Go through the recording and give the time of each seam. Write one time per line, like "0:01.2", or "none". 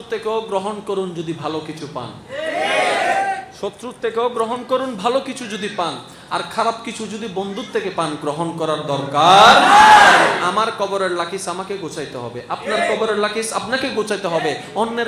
none